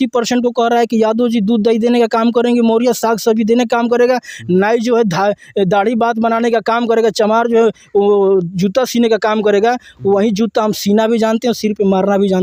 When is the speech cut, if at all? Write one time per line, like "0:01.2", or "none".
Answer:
none